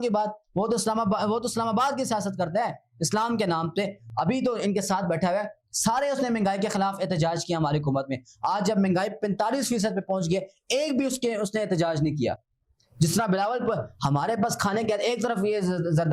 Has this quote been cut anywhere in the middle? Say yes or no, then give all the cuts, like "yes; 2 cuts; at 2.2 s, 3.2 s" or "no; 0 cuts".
no; 0 cuts